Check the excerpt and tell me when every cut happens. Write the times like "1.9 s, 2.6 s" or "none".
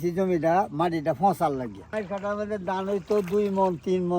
1.8 s